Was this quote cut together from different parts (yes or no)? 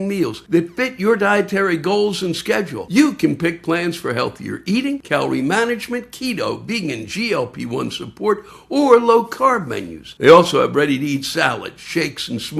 no